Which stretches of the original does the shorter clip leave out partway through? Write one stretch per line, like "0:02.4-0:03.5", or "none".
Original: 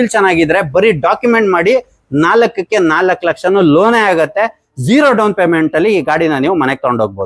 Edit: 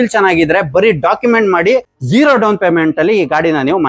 0:02.0-0:04.7